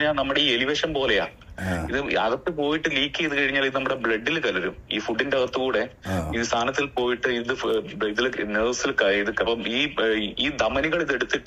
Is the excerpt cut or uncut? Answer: uncut